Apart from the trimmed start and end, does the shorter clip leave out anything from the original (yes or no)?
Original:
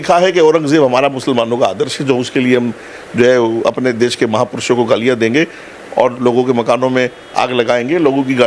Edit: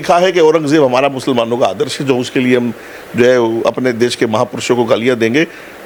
no